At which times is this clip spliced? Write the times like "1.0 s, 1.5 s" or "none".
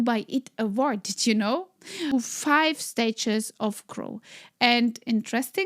2.1 s